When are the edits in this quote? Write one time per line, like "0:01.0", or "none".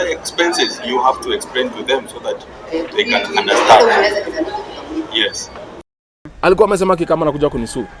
0:05.8

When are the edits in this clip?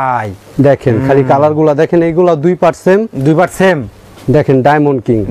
none

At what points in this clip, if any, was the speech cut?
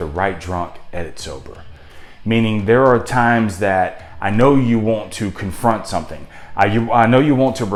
none

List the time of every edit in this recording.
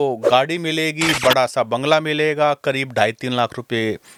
none

